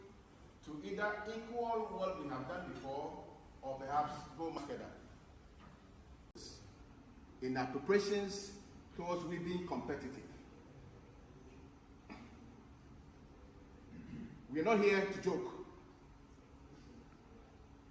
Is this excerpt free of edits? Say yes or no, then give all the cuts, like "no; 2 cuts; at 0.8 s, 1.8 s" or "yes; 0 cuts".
no; 2 cuts; at 4.6 s, 6.4 s